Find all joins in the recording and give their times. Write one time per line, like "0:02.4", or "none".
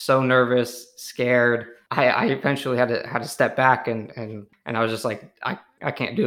0:01.8
0:04.5